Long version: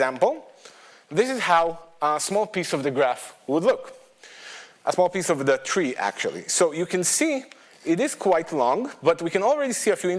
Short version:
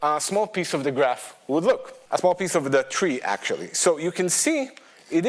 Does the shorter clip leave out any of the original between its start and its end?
yes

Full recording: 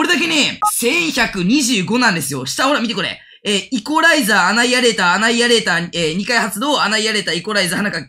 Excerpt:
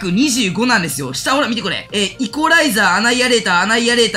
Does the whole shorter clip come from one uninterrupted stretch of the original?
no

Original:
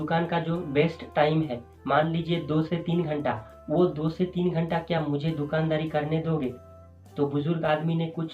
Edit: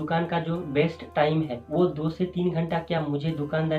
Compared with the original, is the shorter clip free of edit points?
no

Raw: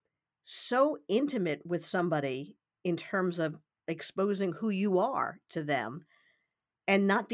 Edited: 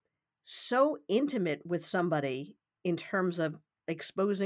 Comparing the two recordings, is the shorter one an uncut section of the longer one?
yes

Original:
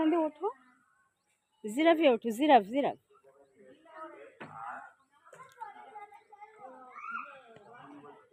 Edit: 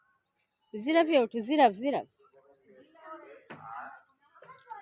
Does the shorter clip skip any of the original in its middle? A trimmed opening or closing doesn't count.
no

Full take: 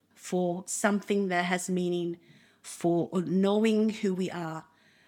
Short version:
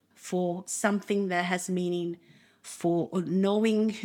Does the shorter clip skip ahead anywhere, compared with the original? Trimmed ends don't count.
no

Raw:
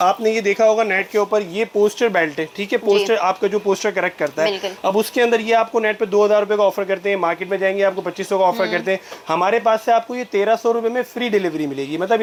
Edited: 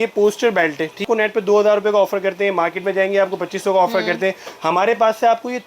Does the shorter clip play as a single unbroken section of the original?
no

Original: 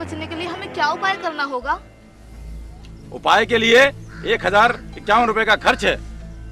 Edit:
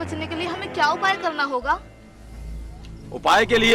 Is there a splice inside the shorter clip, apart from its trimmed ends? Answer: no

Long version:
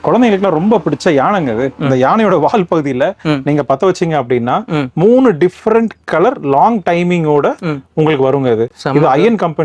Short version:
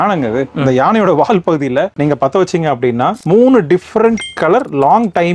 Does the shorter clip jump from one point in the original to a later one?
yes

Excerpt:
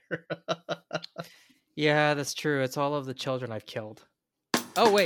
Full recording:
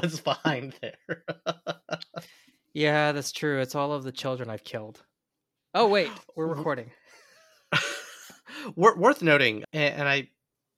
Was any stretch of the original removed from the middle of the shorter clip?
no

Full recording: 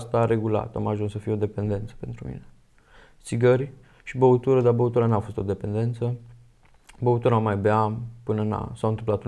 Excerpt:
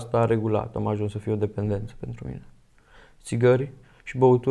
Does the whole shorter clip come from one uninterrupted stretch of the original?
yes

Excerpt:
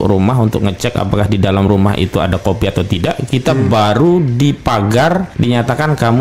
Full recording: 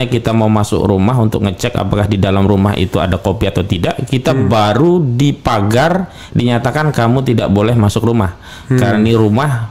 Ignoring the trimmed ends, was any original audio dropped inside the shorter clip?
yes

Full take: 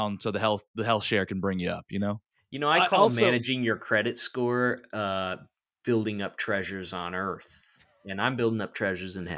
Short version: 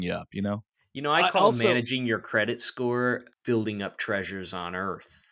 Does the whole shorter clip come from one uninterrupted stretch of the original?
no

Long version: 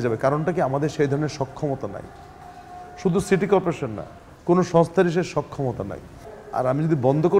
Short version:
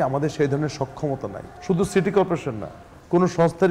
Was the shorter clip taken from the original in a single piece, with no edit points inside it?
no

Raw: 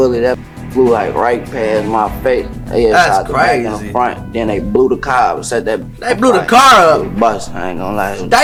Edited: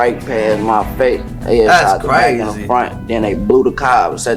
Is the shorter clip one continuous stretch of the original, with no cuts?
yes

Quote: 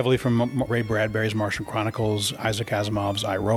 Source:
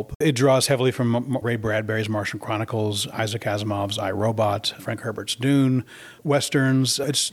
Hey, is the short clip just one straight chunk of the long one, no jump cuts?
yes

